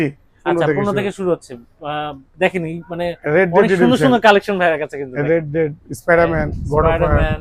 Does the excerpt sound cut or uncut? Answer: uncut